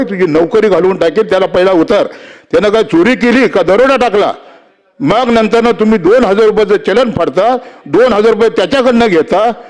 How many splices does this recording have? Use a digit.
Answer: 0